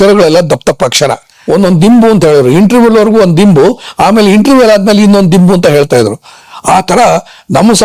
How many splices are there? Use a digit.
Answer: 1